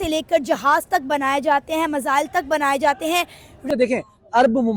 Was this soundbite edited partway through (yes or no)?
yes